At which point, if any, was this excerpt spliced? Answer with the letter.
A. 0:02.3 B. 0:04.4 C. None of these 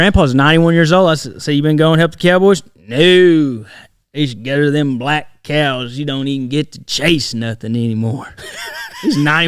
C